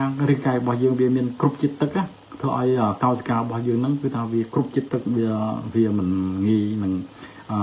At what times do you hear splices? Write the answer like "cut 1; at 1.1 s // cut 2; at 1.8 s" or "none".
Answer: none

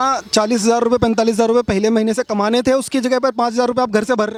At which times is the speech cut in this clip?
none

